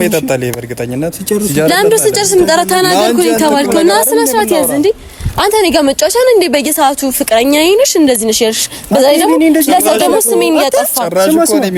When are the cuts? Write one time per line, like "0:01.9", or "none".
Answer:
none